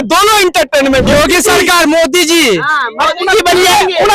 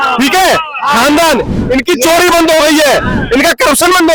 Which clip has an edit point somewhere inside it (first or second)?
first